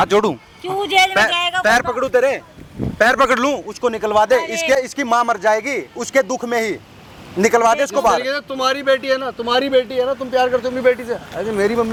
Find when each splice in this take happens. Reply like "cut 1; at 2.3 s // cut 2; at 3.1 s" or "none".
none

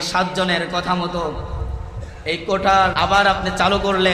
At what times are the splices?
cut 1; at 2.9 s

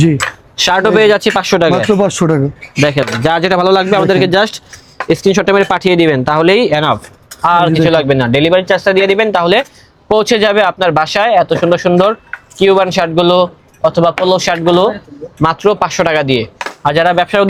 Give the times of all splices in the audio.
none

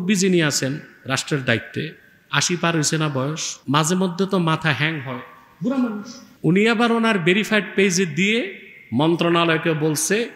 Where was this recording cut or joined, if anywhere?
cut 1; at 3.5 s // cut 2; at 6.2 s

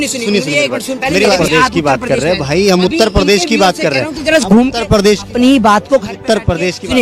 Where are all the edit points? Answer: cut 1; at 1.4 s

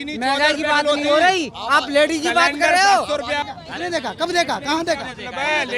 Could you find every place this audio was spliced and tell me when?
cut 1; at 3.6 s

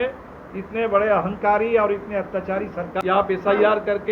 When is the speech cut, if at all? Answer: cut 1; at 2.8 s

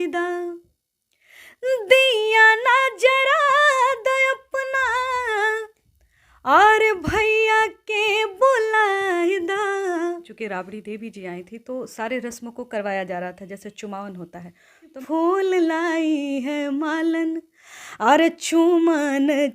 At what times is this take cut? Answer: cut 1; at 10.3 s // cut 2; at 15.0 s

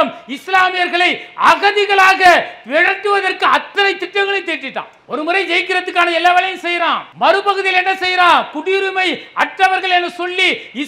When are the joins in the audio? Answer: cut 1; at 7.1 s

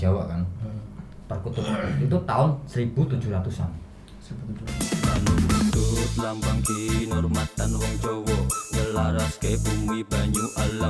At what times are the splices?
cut 1; at 4.7 s

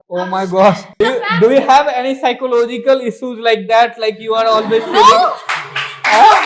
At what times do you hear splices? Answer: cut 1; at 1.0 s

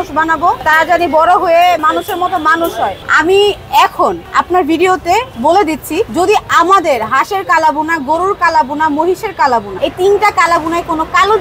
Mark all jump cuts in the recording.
cut 1; at 1.8 s // cut 2; at 3.1 s // cut 3; at 6.1 s // cut 4; at 9.7 s

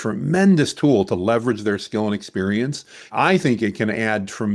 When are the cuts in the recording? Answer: cut 1; at 3.1 s

